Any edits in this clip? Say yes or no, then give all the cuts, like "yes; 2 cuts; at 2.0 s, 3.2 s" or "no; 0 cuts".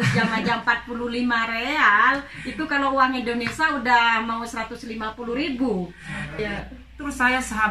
yes; 1 cut; at 6.4 s